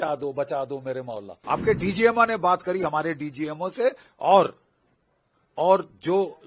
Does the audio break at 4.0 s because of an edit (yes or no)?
no